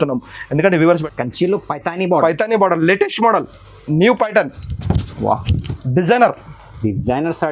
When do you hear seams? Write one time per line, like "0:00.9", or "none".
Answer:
0:01.0